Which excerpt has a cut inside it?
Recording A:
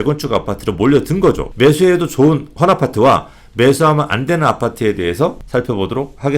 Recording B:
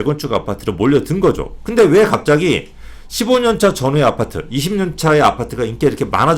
A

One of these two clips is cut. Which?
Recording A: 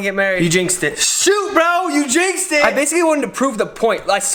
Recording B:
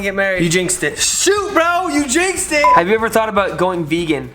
B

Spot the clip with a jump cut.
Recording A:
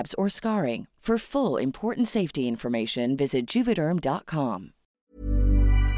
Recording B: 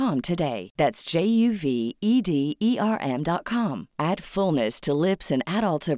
A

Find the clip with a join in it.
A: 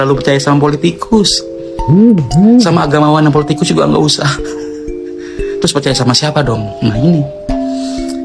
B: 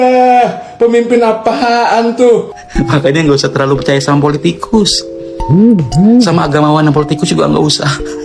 B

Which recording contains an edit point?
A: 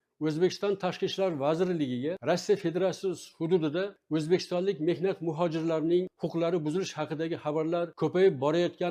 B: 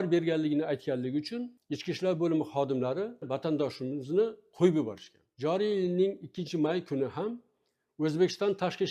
B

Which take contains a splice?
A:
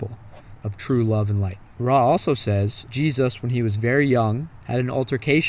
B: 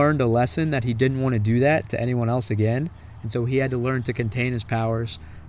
A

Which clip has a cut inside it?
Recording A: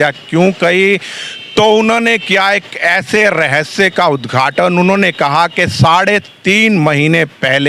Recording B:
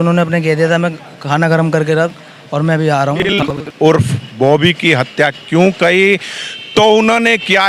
B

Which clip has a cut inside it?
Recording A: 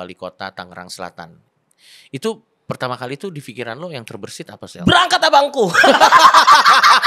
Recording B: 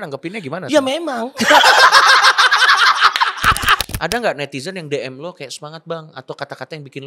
B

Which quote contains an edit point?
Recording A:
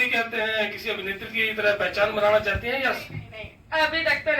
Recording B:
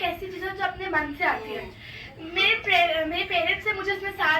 A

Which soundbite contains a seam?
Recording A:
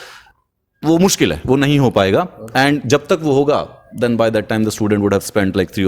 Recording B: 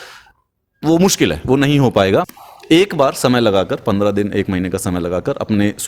B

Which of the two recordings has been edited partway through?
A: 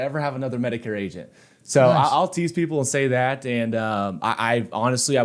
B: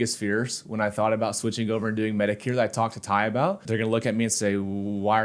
B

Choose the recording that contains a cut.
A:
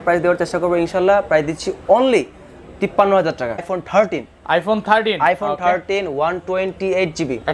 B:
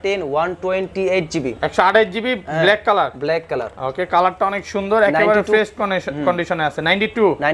A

